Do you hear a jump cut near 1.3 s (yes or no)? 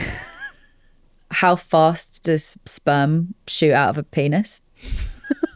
yes